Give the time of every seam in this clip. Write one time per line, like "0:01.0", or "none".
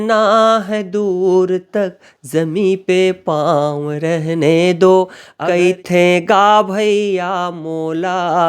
0:05.2